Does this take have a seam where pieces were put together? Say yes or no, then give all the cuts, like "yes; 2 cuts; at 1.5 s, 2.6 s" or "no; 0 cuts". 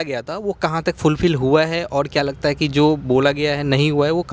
no; 0 cuts